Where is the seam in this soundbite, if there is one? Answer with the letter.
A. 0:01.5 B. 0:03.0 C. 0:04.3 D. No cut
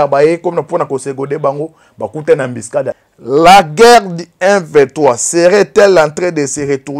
B